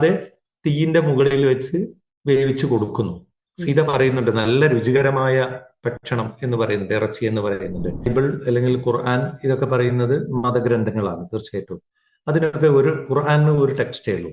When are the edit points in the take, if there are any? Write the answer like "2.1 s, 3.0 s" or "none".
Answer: 8.1 s